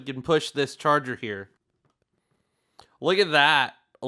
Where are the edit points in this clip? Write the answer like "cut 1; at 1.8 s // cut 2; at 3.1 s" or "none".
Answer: cut 1; at 1.6 s